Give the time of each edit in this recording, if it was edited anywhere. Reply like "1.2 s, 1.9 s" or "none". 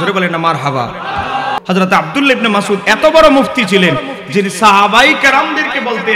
1.6 s